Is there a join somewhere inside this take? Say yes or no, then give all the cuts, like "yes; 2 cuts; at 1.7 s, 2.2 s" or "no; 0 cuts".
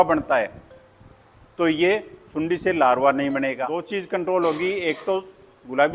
yes; 1 cut; at 3.9 s